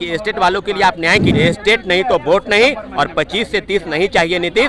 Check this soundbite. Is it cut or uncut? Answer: cut